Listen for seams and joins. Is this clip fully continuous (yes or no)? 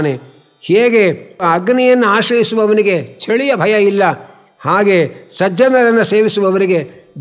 no